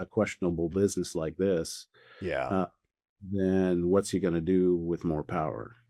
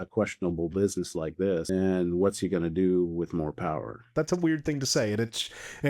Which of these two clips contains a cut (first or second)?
second